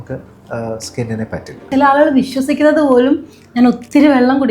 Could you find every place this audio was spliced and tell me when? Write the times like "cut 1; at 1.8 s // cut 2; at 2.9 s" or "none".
cut 1; at 1.6 s